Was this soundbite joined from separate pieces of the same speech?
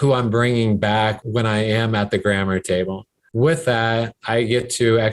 yes; 1 cut; at 3.2 s

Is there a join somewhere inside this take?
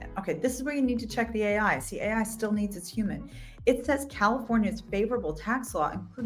no; 0 cuts

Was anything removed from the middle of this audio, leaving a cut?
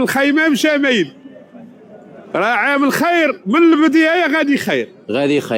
no; 0 cuts

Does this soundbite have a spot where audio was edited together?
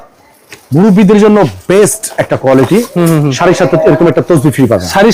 no; 0 cuts

